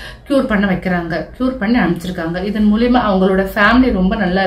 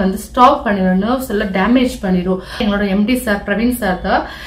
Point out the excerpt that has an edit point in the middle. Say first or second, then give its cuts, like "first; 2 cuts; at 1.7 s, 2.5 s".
second; 1 cut; at 2.6 s